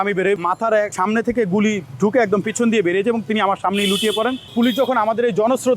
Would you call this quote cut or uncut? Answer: cut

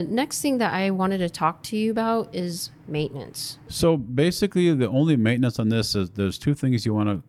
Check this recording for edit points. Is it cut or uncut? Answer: cut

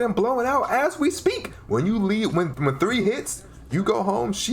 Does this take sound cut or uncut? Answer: cut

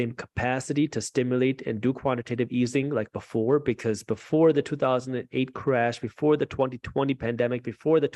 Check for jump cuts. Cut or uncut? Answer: uncut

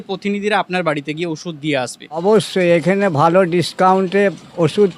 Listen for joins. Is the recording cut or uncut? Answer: cut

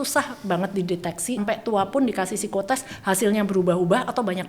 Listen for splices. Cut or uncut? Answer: cut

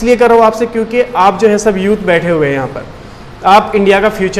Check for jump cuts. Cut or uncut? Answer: uncut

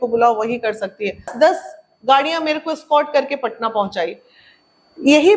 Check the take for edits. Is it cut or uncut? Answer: cut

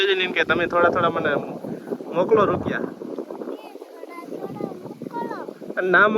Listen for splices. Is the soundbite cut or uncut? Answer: uncut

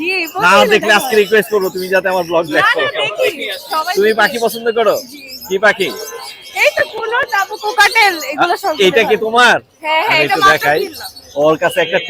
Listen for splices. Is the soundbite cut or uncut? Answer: uncut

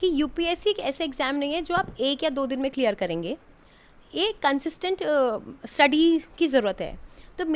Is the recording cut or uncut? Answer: uncut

